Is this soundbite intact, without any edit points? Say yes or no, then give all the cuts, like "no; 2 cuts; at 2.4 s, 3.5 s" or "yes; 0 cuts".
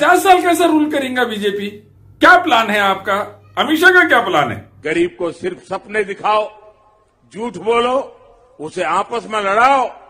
no; 1 cut; at 4.7 s